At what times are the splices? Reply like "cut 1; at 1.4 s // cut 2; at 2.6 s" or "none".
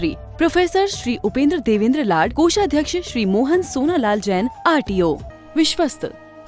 cut 1; at 5.3 s